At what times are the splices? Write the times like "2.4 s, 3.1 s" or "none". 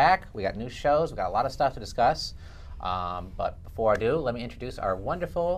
4.0 s